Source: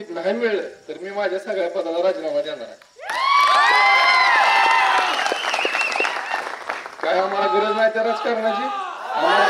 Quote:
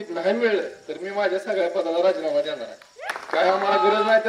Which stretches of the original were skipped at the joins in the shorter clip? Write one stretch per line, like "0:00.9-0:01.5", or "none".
0:03.0-0:06.7

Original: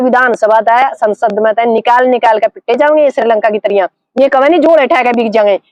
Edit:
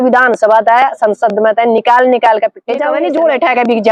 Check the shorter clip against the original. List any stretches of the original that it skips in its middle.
0:02.9-0:04.4

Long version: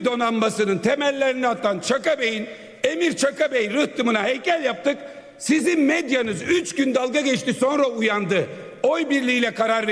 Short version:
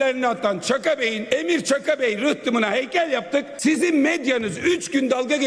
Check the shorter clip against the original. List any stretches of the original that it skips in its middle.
0:02.4-0:02.7
0:05.0-0:05.4

